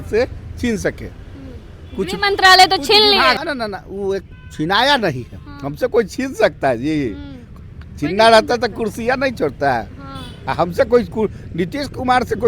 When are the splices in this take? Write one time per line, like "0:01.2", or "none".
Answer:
0:03.4

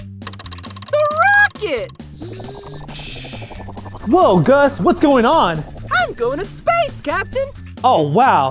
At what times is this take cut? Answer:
0:02.0

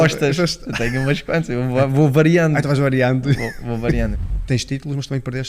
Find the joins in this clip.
0:04.2

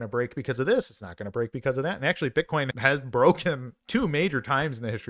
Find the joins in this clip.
0:02.7

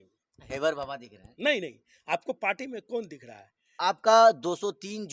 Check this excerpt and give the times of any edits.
0:03.8

